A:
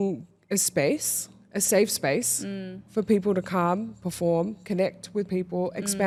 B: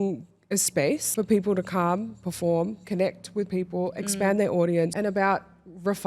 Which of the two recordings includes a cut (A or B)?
B